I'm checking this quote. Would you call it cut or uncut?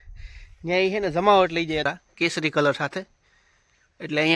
cut